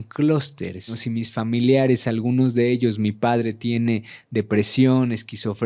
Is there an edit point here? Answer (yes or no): yes